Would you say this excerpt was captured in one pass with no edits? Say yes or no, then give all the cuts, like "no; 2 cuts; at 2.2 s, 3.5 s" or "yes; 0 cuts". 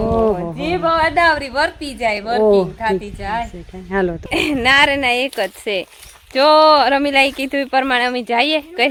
yes; 0 cuts